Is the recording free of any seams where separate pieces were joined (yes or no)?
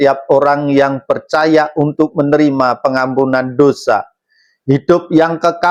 yes